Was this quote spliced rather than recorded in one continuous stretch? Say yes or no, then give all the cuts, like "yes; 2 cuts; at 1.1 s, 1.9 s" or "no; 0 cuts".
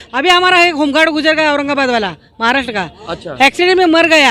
no; 0 cuts